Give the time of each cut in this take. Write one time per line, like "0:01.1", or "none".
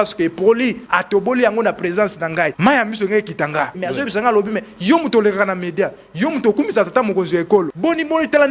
0:00.8
0:02.5
0:03.8
0:07.7